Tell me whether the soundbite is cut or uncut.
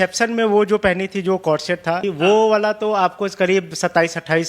cut